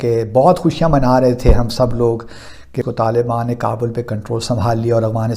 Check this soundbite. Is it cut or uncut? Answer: cut